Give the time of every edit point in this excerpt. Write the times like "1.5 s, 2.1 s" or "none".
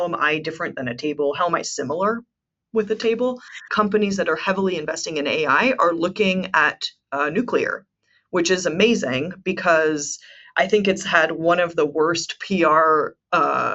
3.7 s

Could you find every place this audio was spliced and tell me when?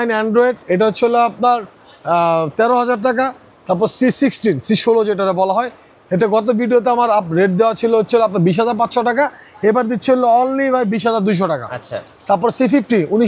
none

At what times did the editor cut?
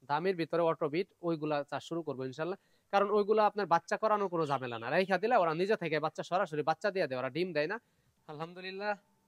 8.3 s

